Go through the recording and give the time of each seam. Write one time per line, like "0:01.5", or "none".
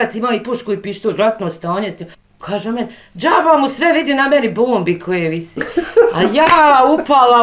0:02.1